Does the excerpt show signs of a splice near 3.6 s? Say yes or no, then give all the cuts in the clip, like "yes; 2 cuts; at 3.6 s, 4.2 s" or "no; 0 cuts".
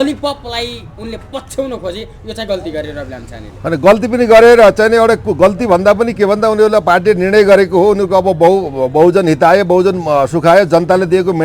no; 0 cuts